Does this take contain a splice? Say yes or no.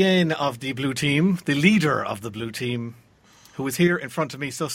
no